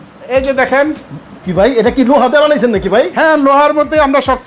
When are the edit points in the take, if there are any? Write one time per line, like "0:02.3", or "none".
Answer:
none